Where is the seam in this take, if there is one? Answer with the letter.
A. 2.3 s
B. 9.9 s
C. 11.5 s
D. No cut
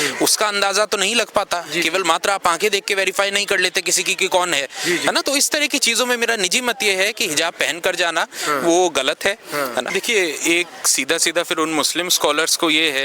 B